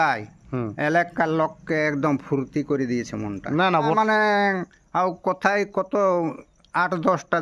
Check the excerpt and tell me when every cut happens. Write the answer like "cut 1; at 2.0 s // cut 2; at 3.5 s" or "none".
cut 1; at 4.0 s